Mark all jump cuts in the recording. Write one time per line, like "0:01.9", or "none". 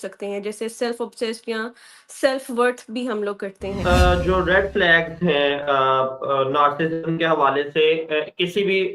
0:03.8